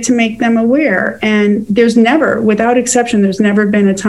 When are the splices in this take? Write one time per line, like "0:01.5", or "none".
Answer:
none

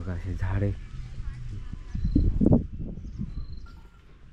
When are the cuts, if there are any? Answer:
none

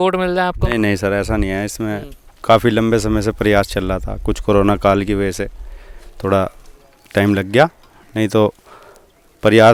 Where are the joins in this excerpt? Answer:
none

